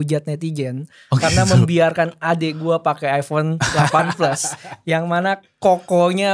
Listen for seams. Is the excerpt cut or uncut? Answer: uncut